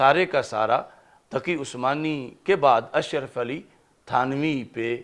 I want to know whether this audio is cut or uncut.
uncut